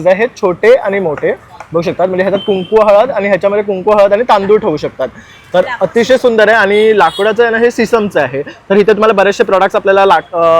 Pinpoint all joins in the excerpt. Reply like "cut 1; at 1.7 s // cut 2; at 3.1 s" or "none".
none